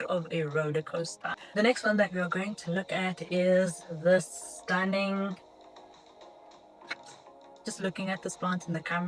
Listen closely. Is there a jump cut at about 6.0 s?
no; 1 cut; at 1.4 s

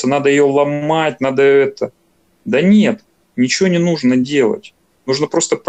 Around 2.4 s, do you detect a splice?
no; 0 cuts

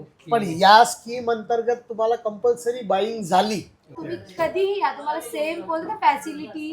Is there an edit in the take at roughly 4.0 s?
yes; 1 cut; at 4.0 s

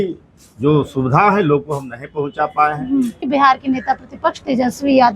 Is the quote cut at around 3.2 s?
yes; 1 cut; at 3.2 s

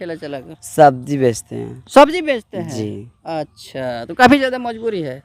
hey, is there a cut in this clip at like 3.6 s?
no; 0 cuts

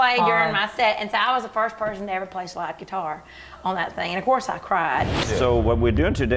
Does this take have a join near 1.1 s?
no; 1 cut; at 5.2 s

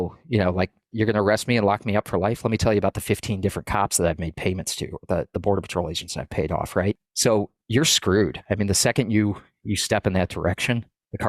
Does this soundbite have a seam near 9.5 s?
no; 1 cut; at 7.1 s

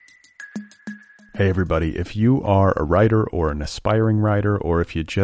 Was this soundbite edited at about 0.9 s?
yes; 1 cut; at 0.9 s

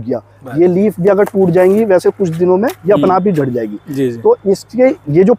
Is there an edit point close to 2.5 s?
no; 0 cuts

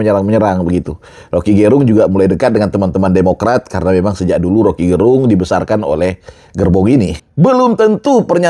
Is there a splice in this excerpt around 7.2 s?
yes; 1 cut; at 7.2 s

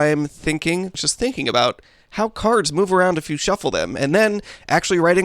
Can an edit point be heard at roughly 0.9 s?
yes; 1 cut; at 0.9 s

